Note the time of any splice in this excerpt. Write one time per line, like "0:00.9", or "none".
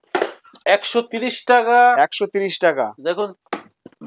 none